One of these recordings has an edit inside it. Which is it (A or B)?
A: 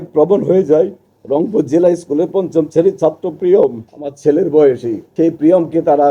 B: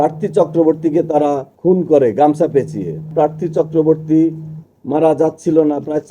B